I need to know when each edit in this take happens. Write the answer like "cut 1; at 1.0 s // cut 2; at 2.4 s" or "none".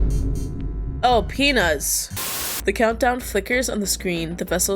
cut 1; at 2.4 s